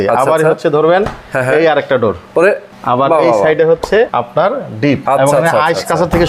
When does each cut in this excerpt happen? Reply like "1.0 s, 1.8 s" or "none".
2.3 s, 4.1 s, 5.0 s